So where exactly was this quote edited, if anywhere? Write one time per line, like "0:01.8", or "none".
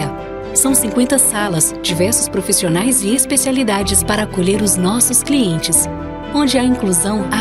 none

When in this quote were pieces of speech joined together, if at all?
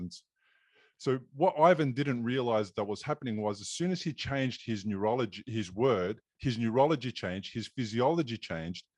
none

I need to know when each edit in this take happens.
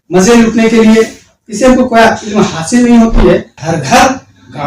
0:03.6

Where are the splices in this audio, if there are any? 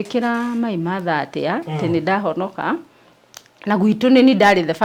none

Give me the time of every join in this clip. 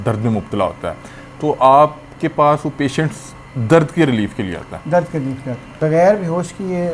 0:05.7

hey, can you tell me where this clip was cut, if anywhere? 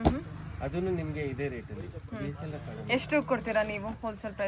none

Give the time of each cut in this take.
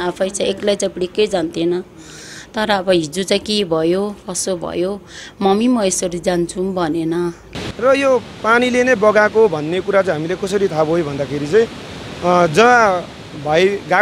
0:07.5

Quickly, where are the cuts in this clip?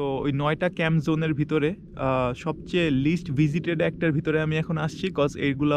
none

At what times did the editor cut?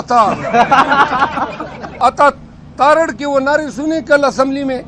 0:01.9

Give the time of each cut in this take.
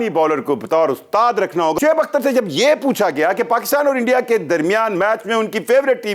0:01.8

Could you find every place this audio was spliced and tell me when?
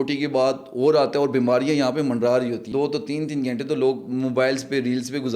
0:02.6

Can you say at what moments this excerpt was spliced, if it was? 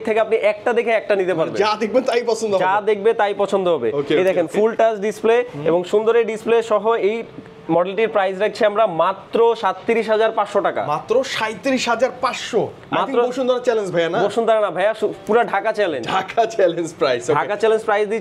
none

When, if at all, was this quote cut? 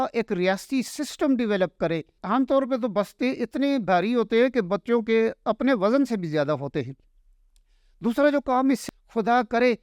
0:02.1
0:08.8

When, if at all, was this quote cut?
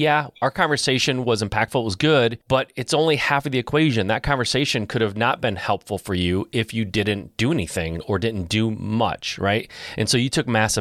0:02.4

